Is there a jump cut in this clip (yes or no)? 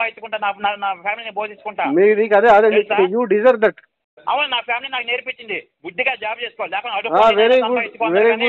yes